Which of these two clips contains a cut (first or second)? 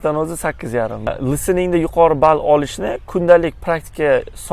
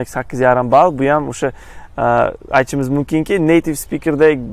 first